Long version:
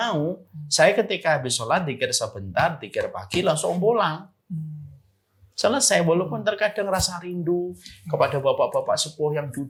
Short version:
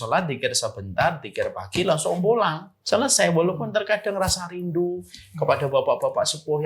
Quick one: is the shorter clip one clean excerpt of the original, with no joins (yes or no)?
no